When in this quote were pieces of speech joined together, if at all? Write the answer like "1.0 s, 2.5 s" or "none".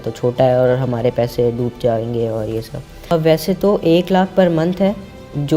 3.1 s